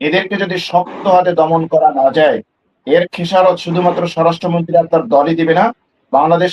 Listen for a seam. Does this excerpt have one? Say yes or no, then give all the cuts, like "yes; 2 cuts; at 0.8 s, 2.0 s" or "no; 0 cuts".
no; 0 cuts